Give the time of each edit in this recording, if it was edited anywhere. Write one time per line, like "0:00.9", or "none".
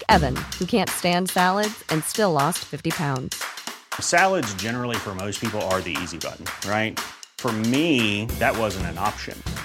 none